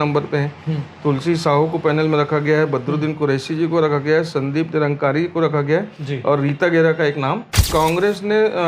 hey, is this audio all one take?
no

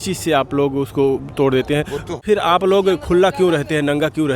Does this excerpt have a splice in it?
yes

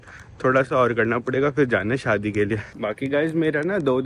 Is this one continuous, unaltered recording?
yes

